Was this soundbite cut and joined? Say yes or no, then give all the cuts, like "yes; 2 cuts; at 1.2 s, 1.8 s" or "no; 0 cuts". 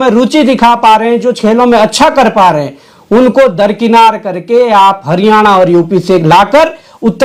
no; 0 cuts